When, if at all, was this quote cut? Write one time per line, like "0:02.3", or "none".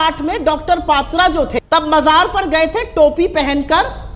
0:01.5